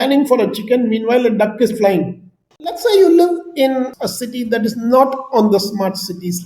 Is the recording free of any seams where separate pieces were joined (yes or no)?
no